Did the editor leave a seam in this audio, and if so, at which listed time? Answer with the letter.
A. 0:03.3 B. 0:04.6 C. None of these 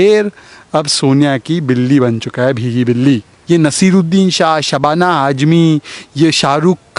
A